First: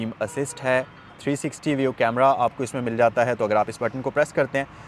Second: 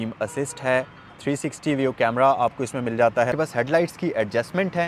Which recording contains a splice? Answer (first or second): second